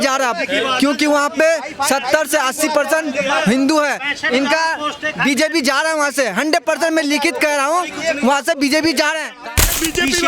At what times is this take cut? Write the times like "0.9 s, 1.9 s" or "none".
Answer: 9.4 s